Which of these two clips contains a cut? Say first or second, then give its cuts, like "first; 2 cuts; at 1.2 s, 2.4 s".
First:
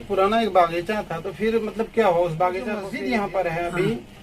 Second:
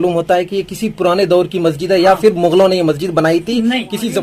first; 1 cut; at 2.9 s